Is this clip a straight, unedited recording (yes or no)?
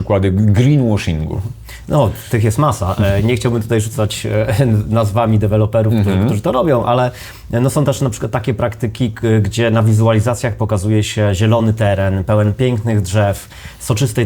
yes